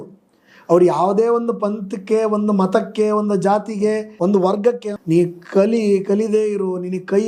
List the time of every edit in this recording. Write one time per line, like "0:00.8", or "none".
0:04.1
0:04.9